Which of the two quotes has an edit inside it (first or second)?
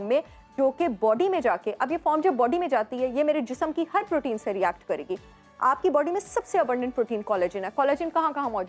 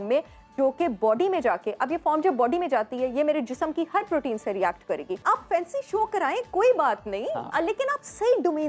second